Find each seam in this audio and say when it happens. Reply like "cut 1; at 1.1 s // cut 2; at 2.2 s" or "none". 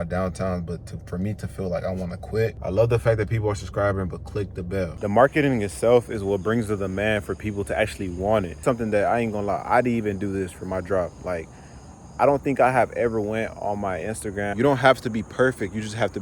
cut 1; at 2.6 s // cut 2; at 5.0 s // cut 3; at 8.6 s // cut 4; at 14.5 s